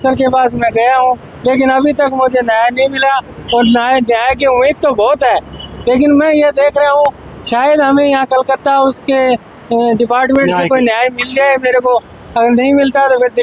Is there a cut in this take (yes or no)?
no